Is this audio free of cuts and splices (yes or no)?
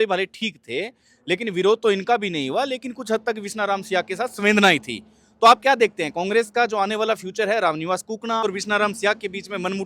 no